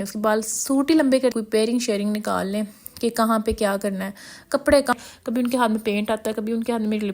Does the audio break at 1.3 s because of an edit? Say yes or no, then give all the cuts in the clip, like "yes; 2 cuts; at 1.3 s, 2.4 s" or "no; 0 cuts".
yes; 2 cuts; at 1.3 s, 4.9 s